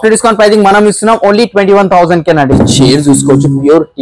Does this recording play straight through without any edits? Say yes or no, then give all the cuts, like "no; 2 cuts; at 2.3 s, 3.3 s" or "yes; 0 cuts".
no; 1 cut; at 2.5 s